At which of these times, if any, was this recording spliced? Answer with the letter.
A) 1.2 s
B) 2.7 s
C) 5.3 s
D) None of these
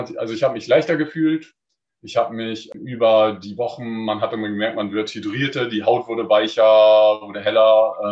B